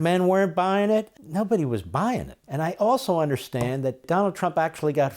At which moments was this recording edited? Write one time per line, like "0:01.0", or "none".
0:01.2
0:02.4
0:04.0